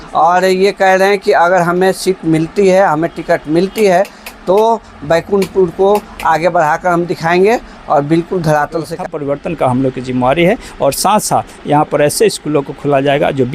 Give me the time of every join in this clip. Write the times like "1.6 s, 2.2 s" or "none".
9.0 s